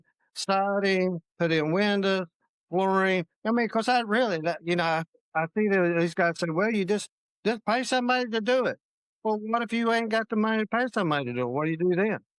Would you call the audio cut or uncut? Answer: uncut